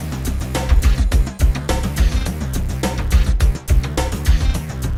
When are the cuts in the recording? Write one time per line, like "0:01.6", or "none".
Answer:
none